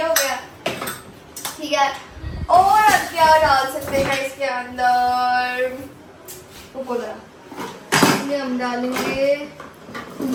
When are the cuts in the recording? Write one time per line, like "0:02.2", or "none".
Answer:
none